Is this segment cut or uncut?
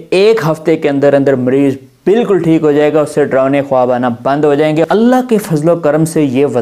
cut